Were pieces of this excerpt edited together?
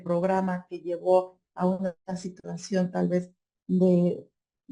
no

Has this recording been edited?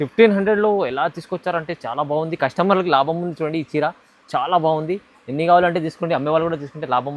no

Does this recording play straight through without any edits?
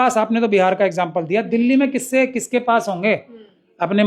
yes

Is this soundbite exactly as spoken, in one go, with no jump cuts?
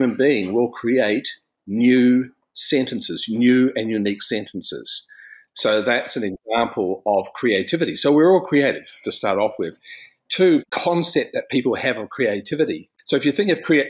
no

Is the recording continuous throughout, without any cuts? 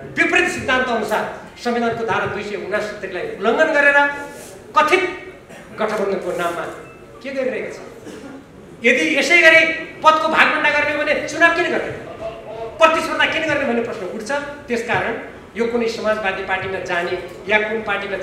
yes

